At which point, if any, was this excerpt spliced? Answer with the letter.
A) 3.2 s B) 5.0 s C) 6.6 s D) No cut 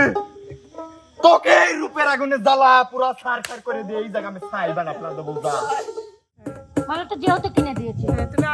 C